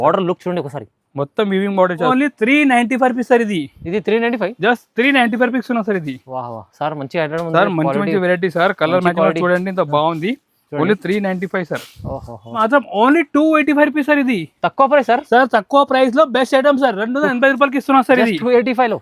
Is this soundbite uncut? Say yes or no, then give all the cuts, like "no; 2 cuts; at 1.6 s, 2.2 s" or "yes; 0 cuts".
no; 2 cuts; at 2.1 s, 12.6 s